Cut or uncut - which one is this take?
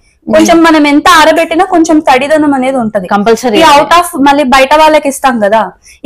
uncut